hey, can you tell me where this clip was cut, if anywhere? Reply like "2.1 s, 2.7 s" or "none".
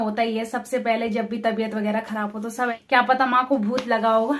2.7 s